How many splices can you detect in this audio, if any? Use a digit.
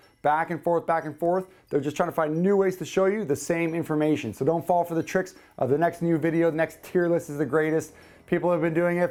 0